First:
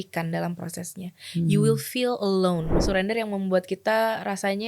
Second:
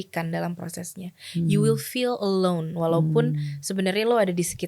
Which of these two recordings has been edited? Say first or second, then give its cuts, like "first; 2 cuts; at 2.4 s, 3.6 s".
first; 1 cut; at 2.7 s